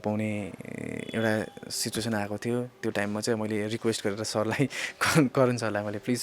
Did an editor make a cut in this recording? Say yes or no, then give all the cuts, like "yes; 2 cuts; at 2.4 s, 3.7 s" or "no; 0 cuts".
no; 0 cuts